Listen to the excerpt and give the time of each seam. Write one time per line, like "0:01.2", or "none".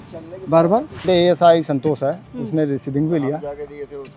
0:01.1